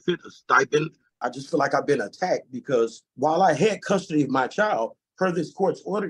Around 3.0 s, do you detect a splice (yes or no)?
yes